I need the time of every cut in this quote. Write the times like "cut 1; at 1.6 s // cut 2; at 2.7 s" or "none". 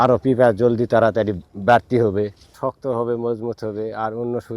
cut 1; at 2.5 s

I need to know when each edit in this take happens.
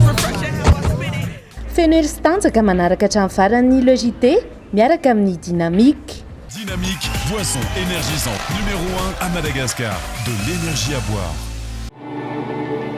cut 1; at 11.9 s

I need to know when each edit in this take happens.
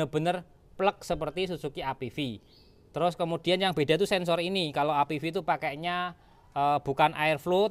none

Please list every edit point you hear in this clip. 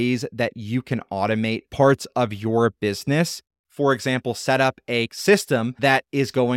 cut 1; at 5.1 s

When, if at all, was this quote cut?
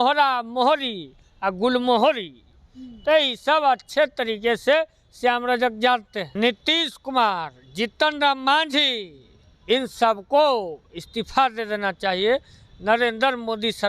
cut 1; at 6.2 s

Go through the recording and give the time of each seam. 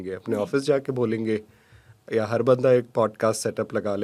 none

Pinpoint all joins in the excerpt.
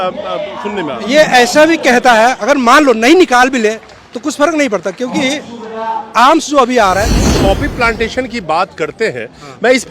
cut 1; at 7.3 s

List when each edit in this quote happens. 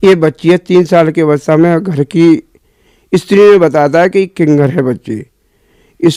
none

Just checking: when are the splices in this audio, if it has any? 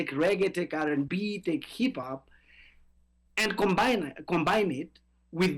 none

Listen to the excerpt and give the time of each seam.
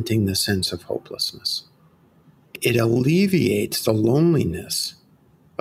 cut 1; at 2.5 s

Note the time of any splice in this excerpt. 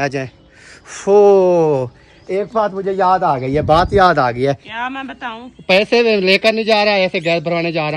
cut 1; at 4.7 s

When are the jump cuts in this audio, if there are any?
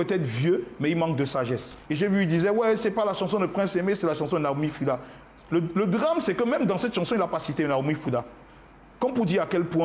cut 1; at 1.7 s

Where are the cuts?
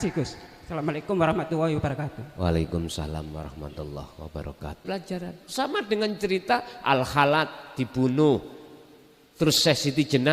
cut 1; at 4.8 s

